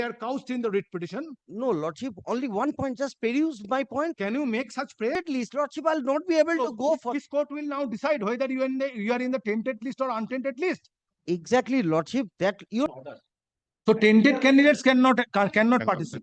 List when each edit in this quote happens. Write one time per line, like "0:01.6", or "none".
0:05.1
0:12.9